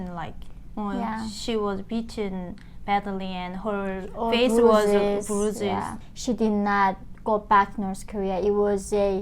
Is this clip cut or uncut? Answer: cut